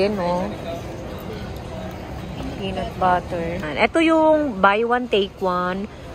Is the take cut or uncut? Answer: cut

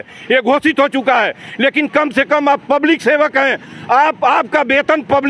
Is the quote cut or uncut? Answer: uncut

